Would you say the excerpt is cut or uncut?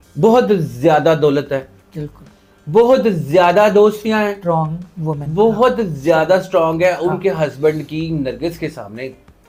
uncut